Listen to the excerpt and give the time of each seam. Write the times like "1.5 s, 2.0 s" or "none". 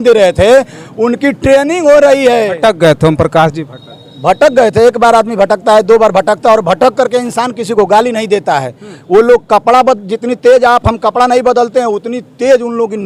none